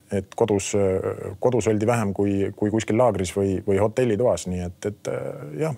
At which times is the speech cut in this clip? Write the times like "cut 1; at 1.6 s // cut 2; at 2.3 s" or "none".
none